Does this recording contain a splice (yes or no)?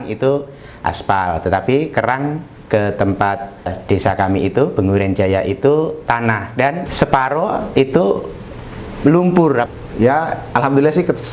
yes